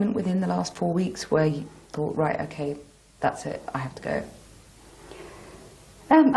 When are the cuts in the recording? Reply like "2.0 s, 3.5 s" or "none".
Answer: 1.8 s

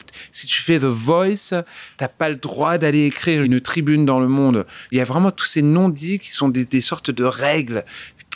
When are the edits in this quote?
3.5 s, 4.9 s

